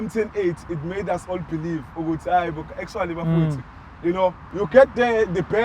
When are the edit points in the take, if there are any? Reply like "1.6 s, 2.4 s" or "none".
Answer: 4.5 s